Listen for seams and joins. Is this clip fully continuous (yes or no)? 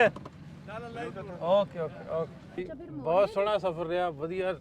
no